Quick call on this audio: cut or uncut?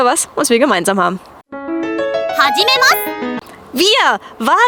uncut